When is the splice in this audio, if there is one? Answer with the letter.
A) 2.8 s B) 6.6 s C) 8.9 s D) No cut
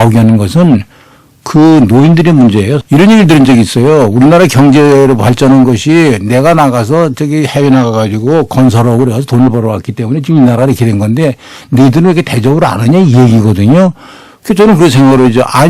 A